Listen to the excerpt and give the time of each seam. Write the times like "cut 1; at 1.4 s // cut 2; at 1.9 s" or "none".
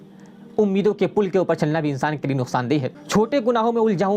cut 1; at 3.0 s